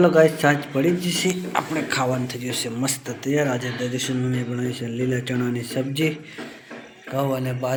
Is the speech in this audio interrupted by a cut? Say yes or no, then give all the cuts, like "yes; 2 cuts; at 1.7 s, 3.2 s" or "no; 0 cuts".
no; 0 cuts